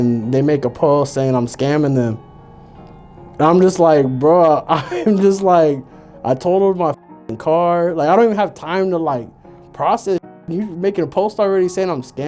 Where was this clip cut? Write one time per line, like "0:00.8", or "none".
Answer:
none